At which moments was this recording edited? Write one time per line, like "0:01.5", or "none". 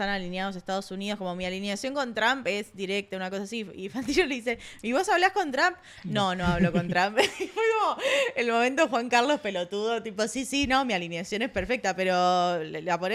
none